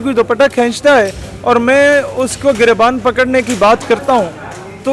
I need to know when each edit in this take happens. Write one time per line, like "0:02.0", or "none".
none